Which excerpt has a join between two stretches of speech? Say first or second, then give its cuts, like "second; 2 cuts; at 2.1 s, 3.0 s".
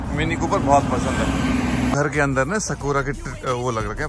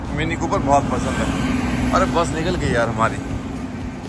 first; 1 cut; at 1.9 s